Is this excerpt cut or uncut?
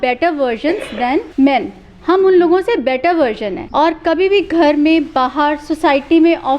cut